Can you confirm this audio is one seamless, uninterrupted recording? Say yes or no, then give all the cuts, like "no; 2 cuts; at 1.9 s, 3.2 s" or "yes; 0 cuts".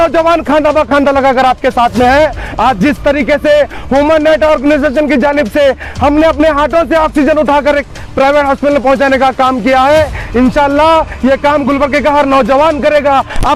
yes; 0 cuts